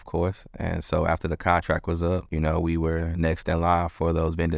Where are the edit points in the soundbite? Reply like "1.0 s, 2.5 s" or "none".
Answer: 2.3 s